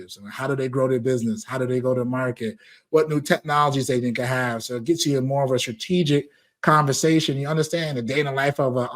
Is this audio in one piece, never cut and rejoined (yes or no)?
yes